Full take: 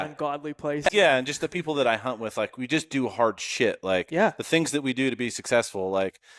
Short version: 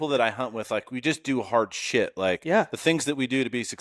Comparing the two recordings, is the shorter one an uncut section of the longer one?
yes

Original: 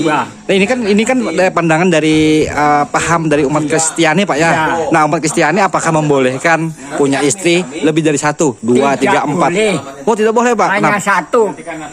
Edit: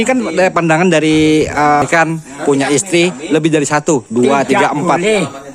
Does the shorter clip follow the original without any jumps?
no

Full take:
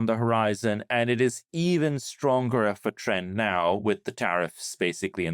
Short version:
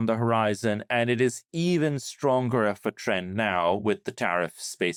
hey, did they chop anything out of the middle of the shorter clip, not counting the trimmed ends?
no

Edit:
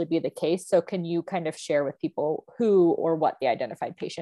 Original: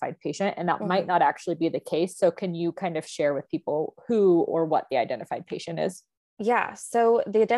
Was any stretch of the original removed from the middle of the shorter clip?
no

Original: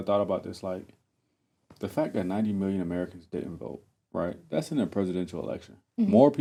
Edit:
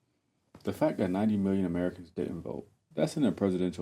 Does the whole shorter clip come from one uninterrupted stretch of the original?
no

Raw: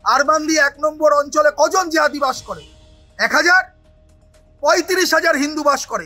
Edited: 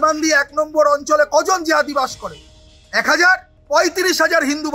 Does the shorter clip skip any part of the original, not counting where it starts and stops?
yes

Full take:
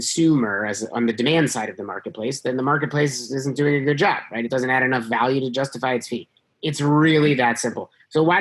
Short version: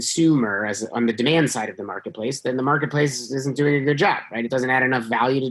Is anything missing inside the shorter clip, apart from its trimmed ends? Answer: no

